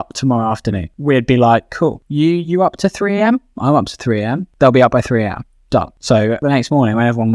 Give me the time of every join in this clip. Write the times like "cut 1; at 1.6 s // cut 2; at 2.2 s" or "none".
cut 1; at 0.9 s // cut 2; at 2.0 s // cut 3; at 4.4 s // cut 4; at 6.3 s